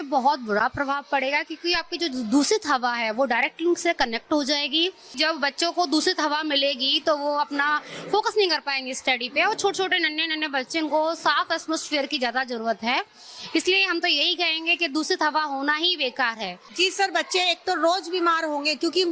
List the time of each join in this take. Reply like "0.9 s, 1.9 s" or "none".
16.7 s